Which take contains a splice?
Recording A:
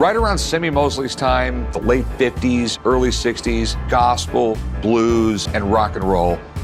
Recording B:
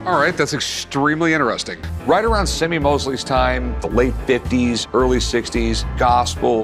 A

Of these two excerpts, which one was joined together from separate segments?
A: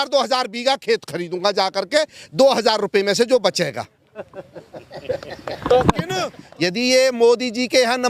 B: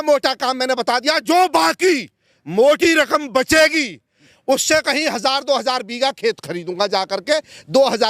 A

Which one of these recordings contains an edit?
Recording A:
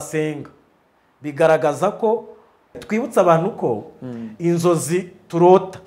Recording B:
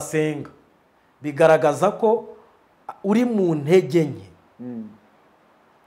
A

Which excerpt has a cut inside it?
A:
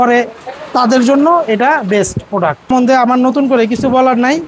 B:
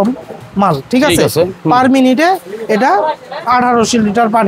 A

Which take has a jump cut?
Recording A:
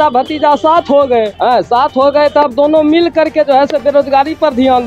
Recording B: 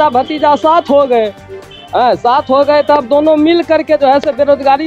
A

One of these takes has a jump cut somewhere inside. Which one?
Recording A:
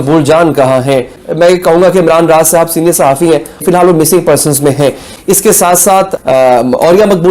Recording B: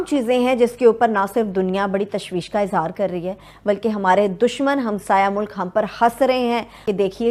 A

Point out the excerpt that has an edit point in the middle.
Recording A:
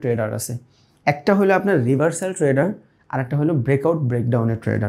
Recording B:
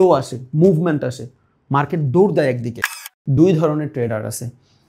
B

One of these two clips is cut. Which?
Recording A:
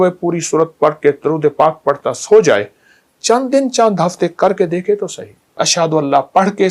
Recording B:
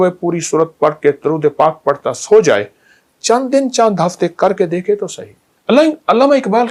A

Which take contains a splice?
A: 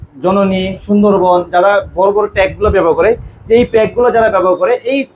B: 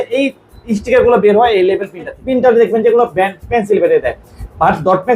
B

